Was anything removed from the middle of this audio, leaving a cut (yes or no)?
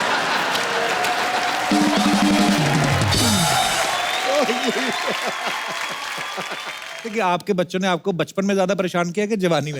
yes